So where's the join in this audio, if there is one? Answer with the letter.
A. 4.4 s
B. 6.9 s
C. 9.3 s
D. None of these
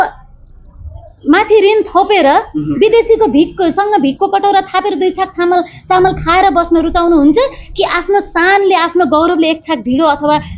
D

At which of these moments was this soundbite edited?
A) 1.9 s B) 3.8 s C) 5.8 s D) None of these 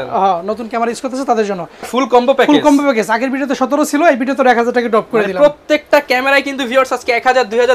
A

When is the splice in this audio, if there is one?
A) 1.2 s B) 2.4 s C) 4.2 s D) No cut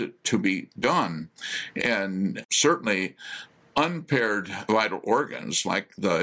B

